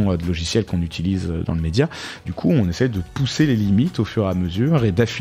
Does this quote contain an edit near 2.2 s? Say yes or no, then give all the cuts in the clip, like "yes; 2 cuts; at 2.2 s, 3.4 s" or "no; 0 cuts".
yes; 1 cut; at 2.2 s